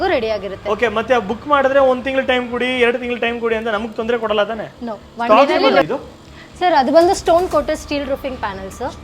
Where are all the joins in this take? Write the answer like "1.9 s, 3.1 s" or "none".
5.8 s